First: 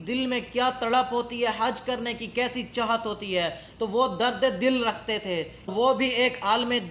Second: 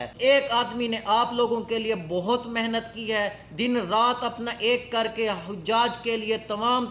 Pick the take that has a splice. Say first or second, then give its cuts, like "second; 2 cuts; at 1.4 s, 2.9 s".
first; 1 cut; at 5.7 s